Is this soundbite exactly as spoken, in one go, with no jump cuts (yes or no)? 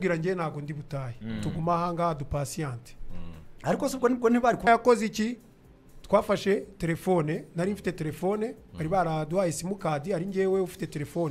no